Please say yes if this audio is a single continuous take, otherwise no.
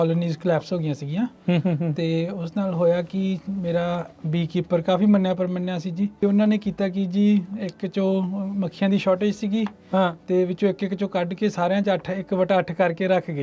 no